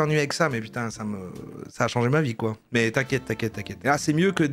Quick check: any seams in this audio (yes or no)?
no